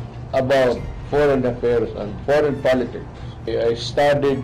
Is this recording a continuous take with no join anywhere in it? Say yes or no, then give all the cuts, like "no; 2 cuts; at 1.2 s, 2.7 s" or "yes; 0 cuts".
no; 3 cuts; at 0.9 s, 2.1 s, 3.5 s